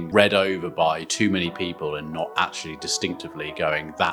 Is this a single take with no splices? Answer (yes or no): yes